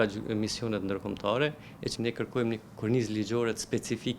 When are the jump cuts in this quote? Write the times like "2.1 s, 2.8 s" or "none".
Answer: 1.9 s